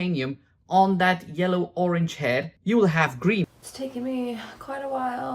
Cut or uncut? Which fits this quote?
cut